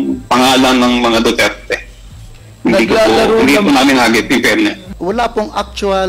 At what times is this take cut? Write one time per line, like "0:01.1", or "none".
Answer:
0:04.8